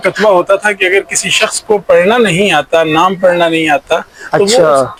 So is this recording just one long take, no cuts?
yes; 0 cuts

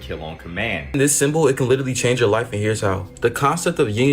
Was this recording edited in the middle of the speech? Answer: yes; 1 cut; at 0.9 s

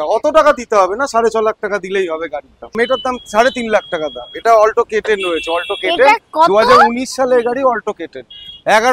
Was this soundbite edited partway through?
yes; 1 cut; at 2.8 s

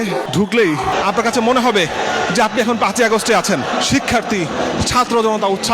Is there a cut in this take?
yes; 2 cuts; at 0.9 s, 3.7 s

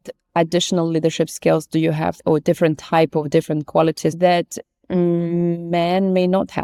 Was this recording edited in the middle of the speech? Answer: no; 0 cuts

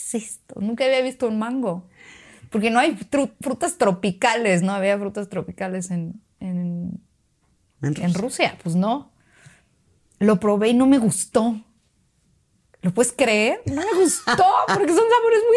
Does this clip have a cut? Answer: no; 0 cuts

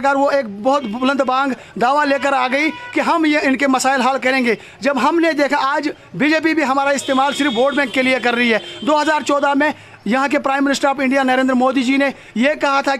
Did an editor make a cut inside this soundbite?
yes; 1 cut; at 4.3 s

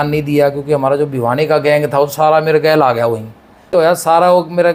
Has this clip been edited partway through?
no; 0 cuts

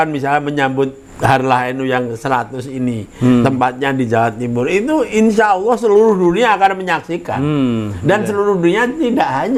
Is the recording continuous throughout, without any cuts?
yes; 0 cuts

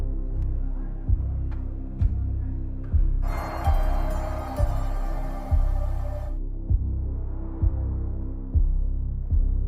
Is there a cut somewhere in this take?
no; 0 cuts

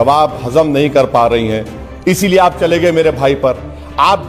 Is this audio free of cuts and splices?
yes; 0 cuts

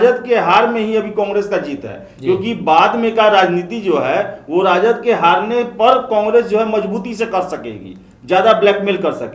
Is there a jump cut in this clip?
no; 0 cuts

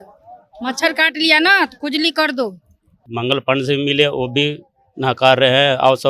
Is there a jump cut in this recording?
yes; 1 cut; at 3.1 s

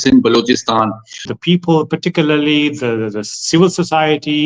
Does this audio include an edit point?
yes; 1 cut; at 1.3 s

